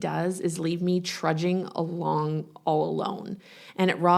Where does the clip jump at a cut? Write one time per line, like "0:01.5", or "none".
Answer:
none